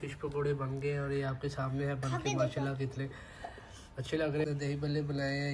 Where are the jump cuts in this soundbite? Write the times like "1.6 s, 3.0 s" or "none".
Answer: 4.4 s